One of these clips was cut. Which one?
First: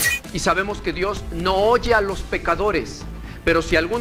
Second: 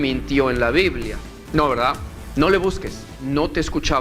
second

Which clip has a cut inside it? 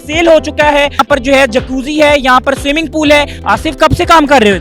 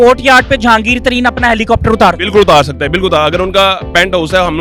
first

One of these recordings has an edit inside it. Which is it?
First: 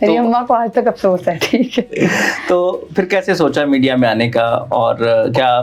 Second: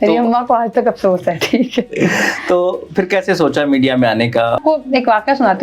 second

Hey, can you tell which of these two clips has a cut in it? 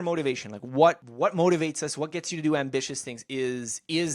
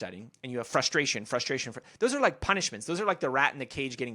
first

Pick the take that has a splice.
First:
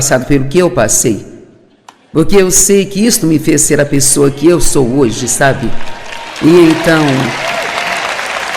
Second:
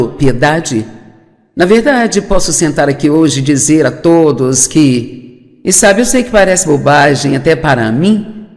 second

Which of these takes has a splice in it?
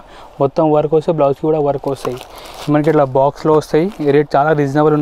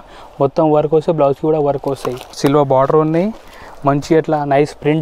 second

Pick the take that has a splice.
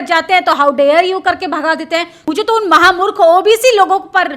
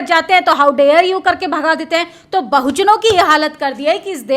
first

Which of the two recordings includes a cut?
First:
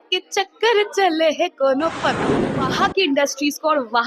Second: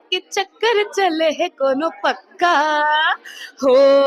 first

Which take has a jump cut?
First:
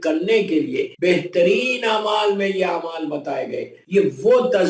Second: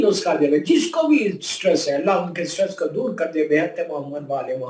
first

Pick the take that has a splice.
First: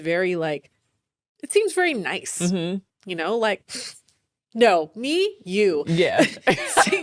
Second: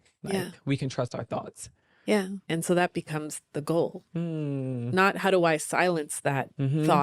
second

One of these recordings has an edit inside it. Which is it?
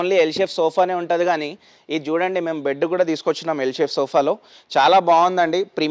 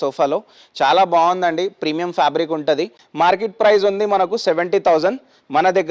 second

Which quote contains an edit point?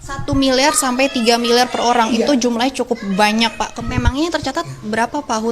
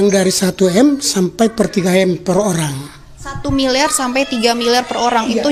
first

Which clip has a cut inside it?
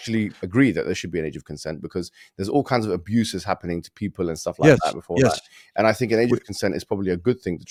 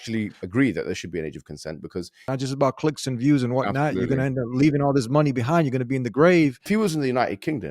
second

